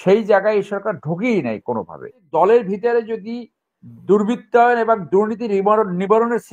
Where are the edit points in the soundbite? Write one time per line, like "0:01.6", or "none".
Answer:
0:02.2

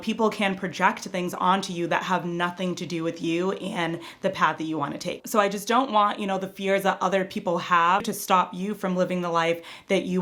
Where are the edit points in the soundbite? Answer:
0:05.2
0:08.0

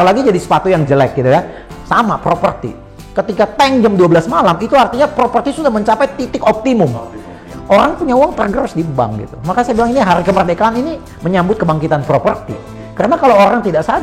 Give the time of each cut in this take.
0:07.4

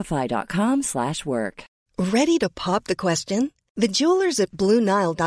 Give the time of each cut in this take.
0:01.7

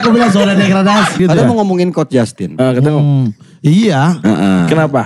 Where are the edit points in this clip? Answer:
0:01.2

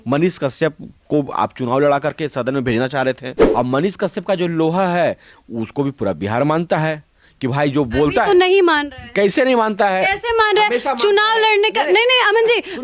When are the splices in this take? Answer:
0:03.3

